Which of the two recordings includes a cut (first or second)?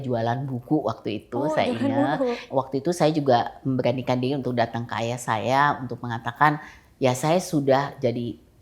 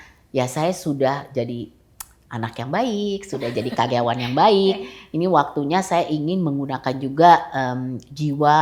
first